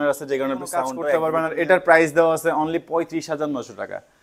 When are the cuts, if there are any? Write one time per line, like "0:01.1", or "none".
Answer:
0:01.1

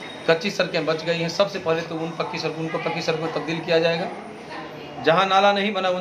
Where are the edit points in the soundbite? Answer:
none

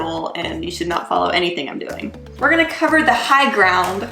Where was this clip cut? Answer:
0:02.3

